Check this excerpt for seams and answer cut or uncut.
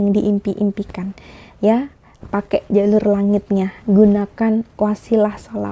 uncut